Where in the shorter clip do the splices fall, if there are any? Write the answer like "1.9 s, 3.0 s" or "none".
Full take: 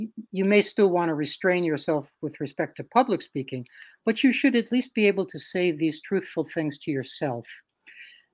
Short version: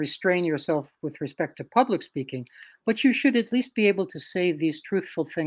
none